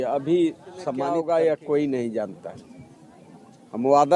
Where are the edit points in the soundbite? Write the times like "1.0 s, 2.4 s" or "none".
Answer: 1.1 s